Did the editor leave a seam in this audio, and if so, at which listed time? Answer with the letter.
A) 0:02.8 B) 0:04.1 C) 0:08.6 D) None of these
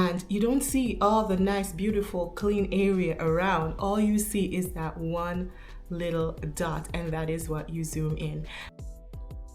C